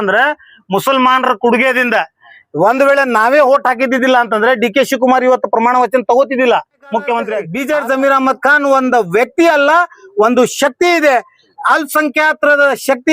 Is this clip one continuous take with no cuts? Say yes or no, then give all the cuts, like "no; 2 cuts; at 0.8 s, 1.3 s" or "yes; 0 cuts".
no; 1 cut; at 7.5 s